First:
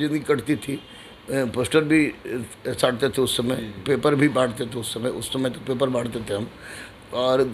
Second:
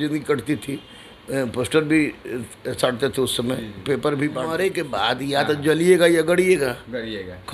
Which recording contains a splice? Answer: second; 1 cut; at 4.4 s

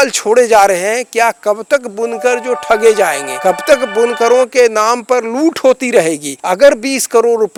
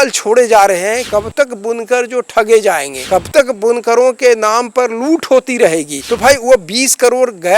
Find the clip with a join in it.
second; 2 cuts; at 1.1 s, 6.0 s

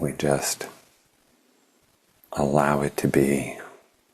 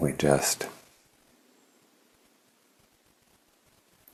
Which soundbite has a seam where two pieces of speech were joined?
first; 1 cut; at 1.8 s

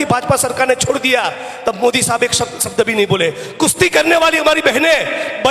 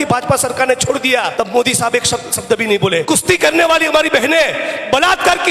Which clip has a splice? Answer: second; 2 cuts; at 1.3 s, 3.0 s

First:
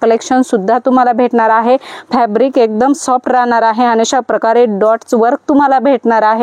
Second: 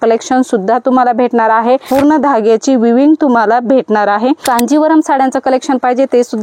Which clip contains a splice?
second; 2 cuts; at 1.9 s, 4.4 s

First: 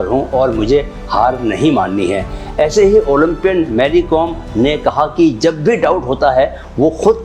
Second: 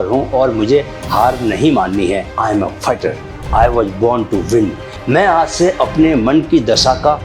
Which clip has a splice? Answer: second; 2 cuts; at 2.3 s, 5.0 s

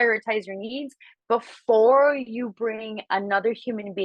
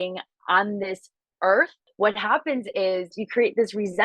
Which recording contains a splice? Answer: second; 2 cuts; at 1.8 s, 3.2 s

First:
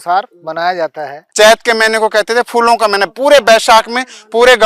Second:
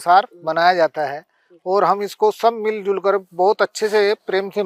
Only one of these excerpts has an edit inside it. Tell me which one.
first; 1 cut; at 1.2 s

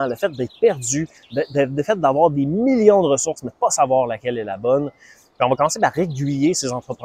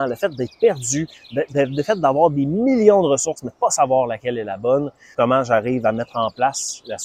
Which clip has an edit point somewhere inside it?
second; 1 cut; at 5.0 s

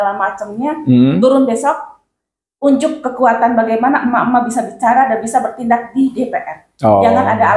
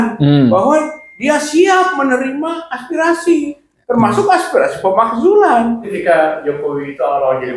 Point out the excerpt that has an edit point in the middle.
second; 1 cut; at 5.9 s

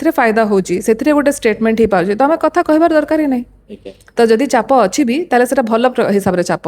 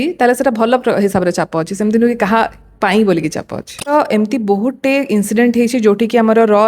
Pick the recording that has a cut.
second; 1 cut; at 3.9 s

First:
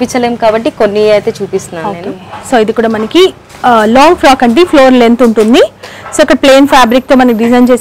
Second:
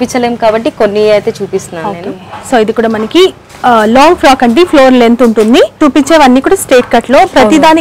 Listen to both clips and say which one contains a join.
second; 1 cut; at 5.8 s

